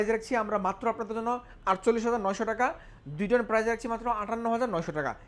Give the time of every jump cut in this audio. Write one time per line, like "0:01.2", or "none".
none